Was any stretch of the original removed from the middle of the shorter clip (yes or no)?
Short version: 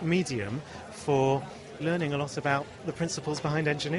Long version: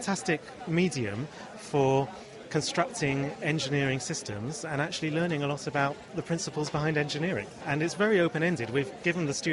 yes